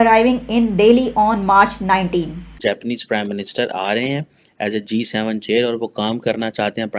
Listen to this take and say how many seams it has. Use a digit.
1